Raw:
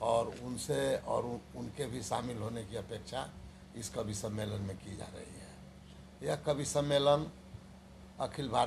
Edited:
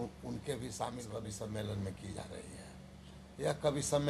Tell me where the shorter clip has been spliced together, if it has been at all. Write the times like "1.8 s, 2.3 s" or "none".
1.1 s